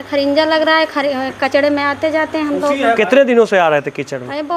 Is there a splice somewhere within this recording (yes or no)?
no